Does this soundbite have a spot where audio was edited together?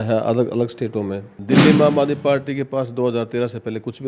yes; 1 cut; at 1.3 s

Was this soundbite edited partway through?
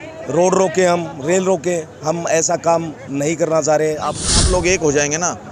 yes; 1 cut; at 4.2 s

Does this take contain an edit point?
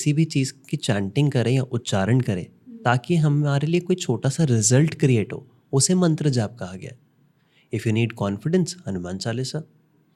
no; 0 cuts

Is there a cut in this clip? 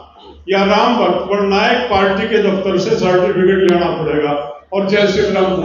no; 0 cuts

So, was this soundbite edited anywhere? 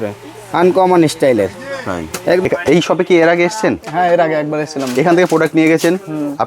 yes; 1 cut; at 2.4 s

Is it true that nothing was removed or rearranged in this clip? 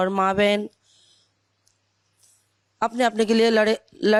yes; 0 cuts

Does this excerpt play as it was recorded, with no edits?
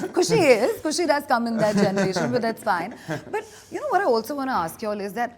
yes; 0 cuts

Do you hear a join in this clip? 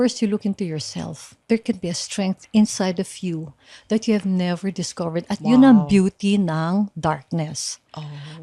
yes; 1 cut; at 1.3 s

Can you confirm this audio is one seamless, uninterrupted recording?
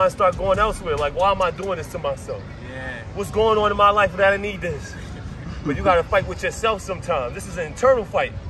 yes; 0 cuts

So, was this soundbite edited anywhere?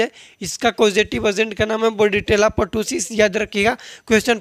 no; 0 cuts

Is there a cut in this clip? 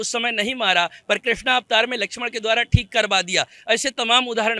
no; 0 cuts

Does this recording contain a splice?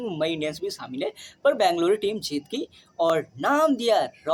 no; 0 cuts

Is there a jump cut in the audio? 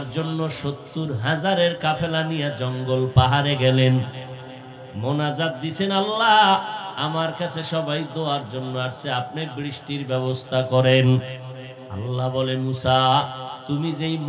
no; 0 cuts

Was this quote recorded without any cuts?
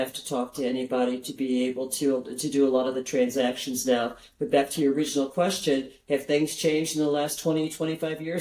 yes; 0 cuts

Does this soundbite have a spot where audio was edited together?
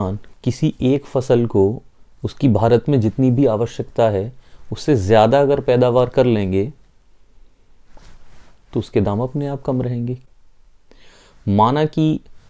yes; 1 cut; at 10.2 s

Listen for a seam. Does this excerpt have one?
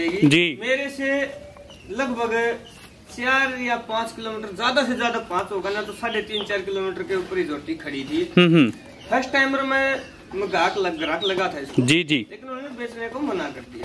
no; 0 cuts

